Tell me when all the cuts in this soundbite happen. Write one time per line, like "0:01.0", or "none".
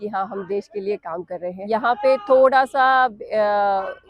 0:01.6